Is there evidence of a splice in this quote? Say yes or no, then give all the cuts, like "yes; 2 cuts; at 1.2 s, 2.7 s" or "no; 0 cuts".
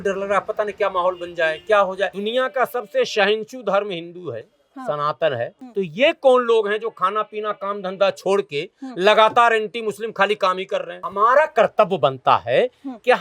yes; 3 cuts; at 2.2 s, 5.6 s, 11.0 s